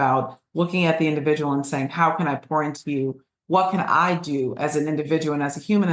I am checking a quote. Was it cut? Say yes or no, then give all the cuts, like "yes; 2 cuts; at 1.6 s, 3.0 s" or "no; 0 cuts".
no; 0 cuts